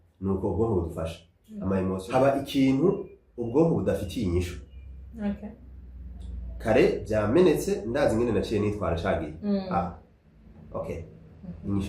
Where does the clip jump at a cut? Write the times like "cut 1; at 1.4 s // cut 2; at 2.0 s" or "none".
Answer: cut 1; at 2.0 s